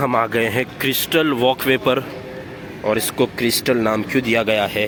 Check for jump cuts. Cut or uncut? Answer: uncut